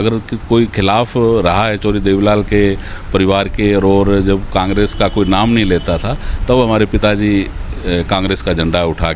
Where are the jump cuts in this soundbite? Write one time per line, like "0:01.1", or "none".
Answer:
none